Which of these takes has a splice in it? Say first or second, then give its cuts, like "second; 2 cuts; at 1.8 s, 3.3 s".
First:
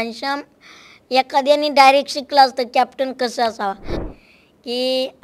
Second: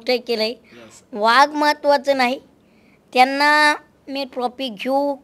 first; 1 cut; at 4.0 s